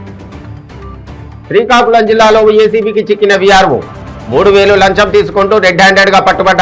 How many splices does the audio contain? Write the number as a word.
one